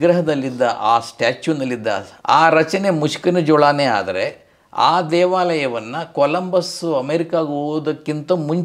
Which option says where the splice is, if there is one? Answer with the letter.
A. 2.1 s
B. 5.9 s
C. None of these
A